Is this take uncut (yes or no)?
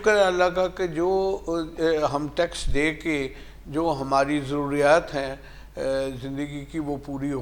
yes